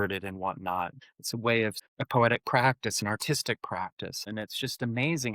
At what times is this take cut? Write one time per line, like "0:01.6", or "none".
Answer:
0:01.0
0:01.8
0:04.2